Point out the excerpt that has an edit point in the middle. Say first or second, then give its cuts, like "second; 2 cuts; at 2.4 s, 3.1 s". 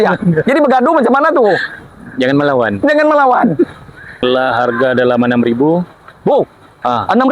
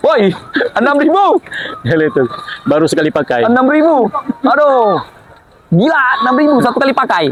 first; 1 cut; at 4.2 s